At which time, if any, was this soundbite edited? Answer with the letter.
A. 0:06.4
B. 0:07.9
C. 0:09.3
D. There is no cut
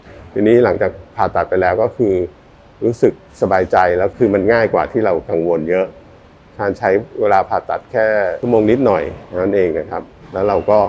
D